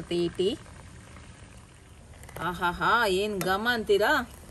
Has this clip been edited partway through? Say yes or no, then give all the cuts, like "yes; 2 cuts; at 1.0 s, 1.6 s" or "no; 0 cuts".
yes; 1 cut; at 1.8 s